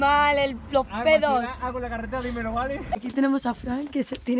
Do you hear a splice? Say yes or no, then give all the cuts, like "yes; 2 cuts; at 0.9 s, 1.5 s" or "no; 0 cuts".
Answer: yes; 1 cut; at 3.0 s